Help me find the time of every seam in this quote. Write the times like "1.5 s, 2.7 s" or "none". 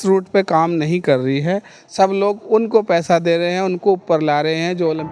none

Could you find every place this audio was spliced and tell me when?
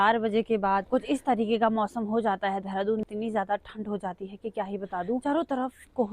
0.9 s, 3.0 s, 5.2 s

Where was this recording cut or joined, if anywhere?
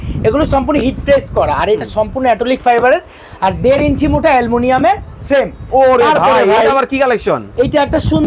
5.6 s

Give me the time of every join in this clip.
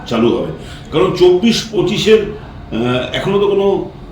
1.7 s

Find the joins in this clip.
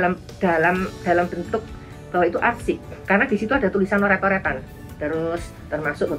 4.8 s

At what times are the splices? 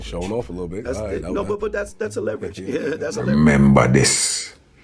3.3 s

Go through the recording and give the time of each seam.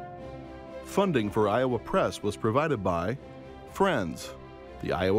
0.9 s

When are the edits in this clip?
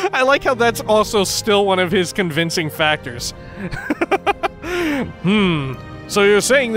none

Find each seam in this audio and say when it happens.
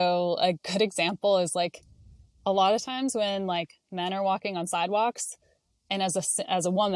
none

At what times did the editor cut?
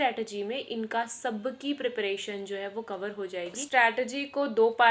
3.6 s

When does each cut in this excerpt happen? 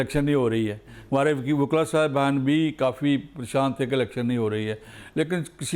none

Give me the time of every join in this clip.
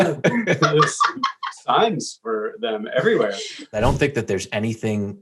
3.8 s

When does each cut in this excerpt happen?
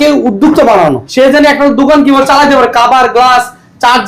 1.0 s

